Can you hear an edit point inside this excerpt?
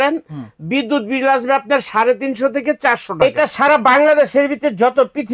yes; 1 cut; at 3.2 s

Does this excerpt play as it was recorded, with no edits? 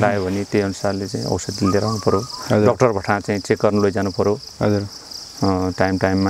yes; 0 cuts

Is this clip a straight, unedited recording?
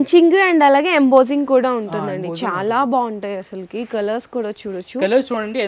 yes; 0 cuts

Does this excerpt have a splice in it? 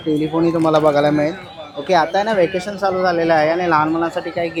no; 0 cuts

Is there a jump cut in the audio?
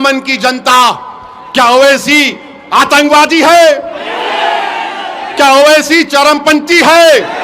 no; 0 cuts

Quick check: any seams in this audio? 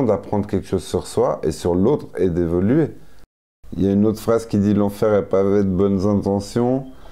yes; 1 cut; at 3.6 s

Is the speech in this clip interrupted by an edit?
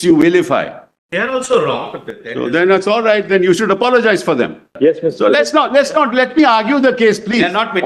yes; 1 cut; at 4.7 s

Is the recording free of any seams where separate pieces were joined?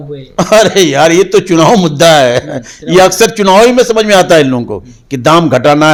yes; 0 cuts

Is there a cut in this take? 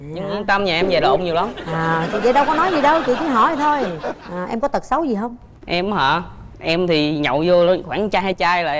no; 0 cuts

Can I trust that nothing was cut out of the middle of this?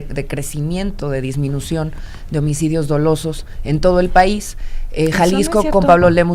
yes; 0 cuts

